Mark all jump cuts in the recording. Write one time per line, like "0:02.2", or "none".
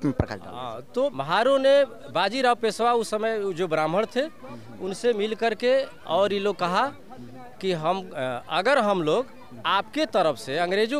0:01.1